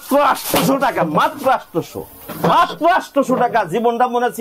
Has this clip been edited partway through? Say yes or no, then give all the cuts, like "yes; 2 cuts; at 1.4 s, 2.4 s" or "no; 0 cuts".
no; 0 cuts